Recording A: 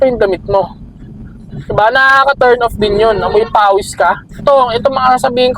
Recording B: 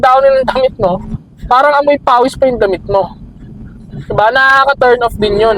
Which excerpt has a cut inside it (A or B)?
A